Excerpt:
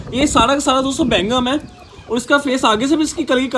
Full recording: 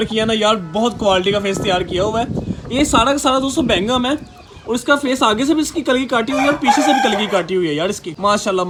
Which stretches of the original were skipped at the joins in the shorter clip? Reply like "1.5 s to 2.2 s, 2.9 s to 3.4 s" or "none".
none